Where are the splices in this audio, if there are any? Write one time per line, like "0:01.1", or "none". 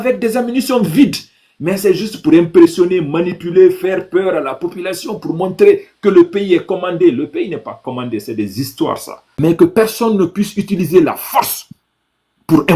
0:09.2

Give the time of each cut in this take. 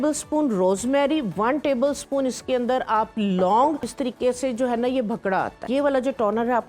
0:03.9
0:05.6

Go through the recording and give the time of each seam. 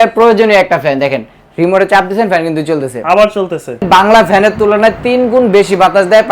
0:03.8

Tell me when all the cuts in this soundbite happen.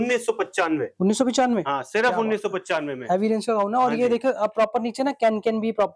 none

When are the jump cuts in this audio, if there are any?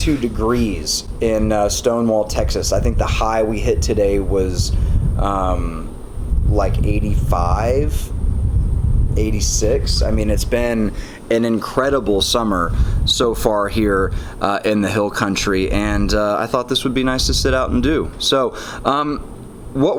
none

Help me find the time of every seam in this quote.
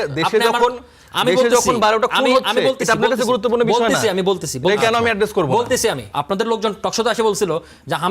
0:06.0

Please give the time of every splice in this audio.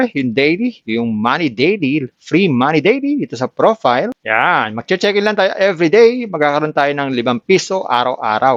none

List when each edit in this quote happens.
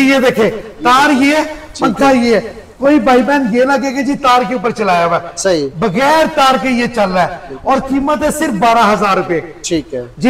none

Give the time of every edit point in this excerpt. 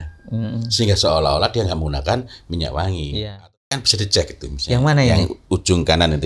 0:03.4

